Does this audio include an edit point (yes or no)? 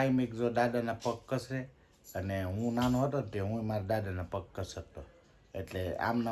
no